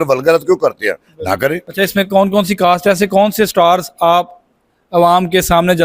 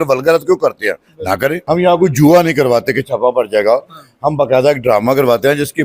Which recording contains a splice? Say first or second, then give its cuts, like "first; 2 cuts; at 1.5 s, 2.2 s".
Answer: second; 1 cut; at 1.6 s